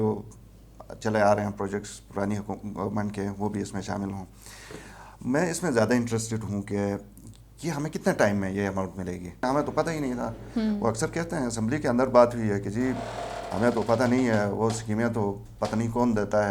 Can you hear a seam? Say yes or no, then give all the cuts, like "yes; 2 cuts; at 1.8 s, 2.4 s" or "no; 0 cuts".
yes; 1 cut; at 9.4 s